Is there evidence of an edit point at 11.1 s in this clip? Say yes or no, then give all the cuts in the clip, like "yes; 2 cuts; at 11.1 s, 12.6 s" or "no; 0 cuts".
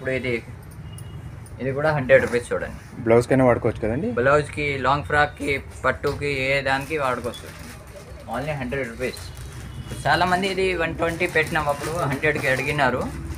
no; 0 cuts